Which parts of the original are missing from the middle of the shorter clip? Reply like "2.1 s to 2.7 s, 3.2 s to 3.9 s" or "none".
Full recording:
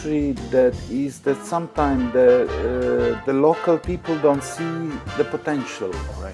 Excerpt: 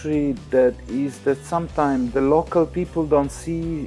2.1 s to 3.2 s